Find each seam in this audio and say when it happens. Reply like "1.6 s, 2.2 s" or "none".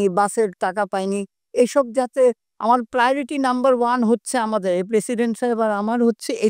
none